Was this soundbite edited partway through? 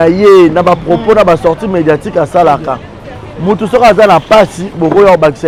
no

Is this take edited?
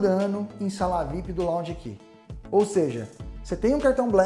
no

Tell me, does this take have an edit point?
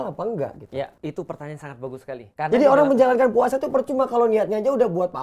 yes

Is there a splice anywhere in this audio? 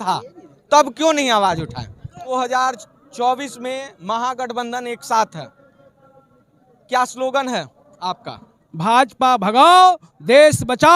yes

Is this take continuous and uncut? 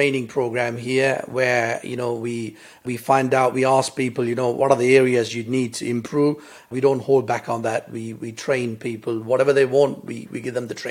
no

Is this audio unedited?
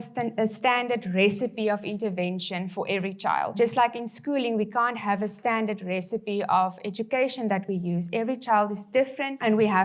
yes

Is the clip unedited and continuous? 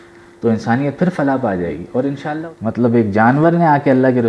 no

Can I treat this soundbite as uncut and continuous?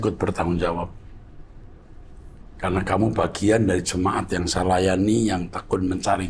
yes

